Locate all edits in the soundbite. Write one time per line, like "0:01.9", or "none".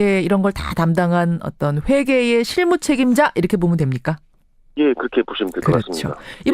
0:03.4